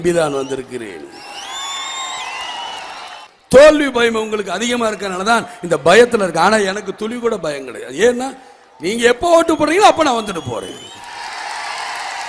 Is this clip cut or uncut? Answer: uncut